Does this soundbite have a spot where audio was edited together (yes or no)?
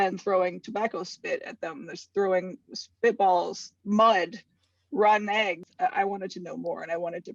yes